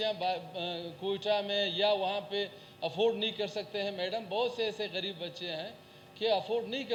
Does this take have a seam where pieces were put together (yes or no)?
no